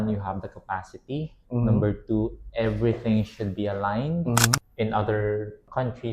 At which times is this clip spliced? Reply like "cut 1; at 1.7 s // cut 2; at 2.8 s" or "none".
cut 1; at 4.6 s